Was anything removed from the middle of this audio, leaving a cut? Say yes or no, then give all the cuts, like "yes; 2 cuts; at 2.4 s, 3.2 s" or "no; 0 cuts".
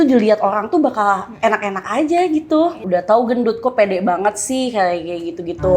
yes; 1 cut; at 2.8 s